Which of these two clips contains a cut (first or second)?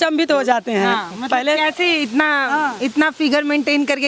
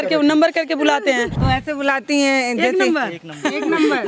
second